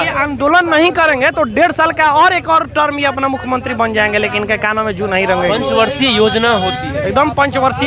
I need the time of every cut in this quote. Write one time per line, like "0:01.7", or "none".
none